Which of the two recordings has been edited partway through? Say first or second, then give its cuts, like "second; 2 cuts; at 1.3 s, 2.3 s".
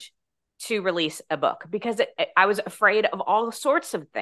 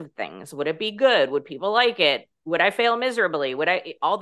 second; 1 cut; at 2.3 s